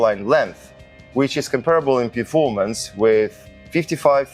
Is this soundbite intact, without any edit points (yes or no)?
yes